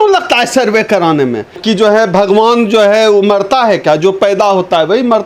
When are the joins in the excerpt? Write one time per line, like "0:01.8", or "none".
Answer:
0:01.6